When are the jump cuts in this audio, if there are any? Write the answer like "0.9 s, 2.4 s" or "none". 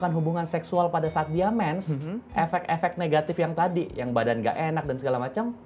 none